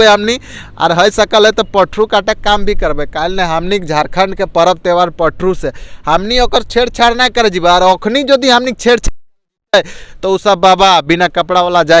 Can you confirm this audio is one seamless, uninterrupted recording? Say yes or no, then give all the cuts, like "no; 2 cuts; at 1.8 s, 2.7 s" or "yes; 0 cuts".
yes; 0 cuts